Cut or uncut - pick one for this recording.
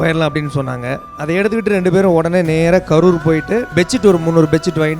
cut